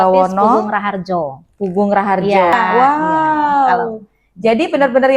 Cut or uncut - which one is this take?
cut